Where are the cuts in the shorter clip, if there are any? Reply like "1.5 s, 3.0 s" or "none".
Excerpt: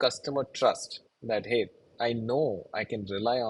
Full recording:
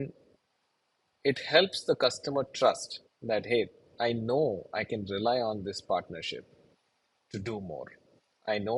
none